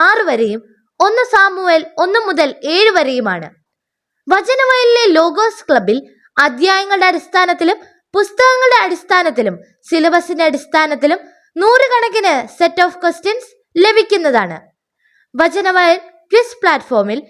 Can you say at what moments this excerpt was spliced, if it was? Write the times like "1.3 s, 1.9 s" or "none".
none